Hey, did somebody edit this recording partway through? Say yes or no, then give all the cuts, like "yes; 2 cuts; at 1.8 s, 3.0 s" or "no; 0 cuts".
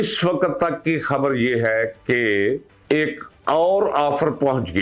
yes; 1 cut; at 2.7 s